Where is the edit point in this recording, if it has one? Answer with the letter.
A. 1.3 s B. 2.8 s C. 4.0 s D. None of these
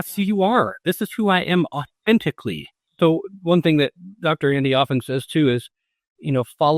B